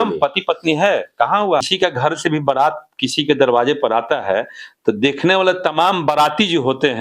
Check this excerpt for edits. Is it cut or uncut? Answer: cut